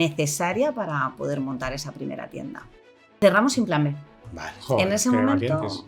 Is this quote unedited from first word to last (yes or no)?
no